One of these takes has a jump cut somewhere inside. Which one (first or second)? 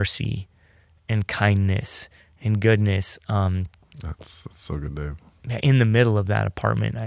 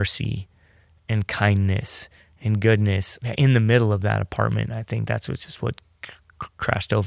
second